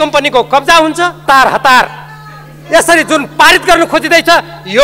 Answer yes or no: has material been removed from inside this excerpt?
yes